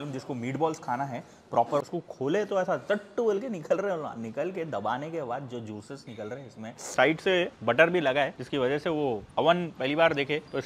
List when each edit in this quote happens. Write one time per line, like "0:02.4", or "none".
0:01.8
0:06.9
0:09.3